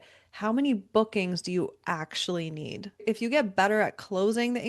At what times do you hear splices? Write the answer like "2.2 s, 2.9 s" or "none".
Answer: 3.0 s